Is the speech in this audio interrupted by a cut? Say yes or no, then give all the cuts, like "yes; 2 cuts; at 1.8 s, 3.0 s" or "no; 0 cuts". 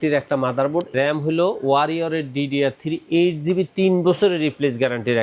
yes; 1 cut; at 0.9 s